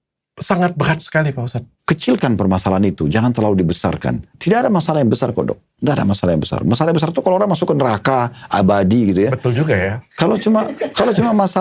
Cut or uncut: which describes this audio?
cut